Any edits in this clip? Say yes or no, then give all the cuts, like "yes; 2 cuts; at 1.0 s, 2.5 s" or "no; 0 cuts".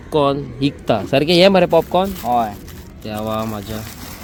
no; 0 cuts